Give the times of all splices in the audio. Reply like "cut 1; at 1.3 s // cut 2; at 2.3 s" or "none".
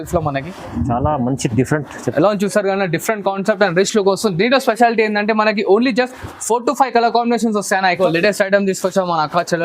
cut 1; at 8.0 s